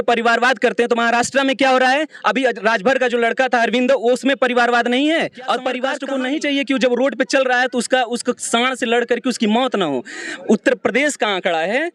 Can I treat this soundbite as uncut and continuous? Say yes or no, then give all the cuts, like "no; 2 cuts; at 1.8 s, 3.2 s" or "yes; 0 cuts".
no; 1 cut; at 6.0 s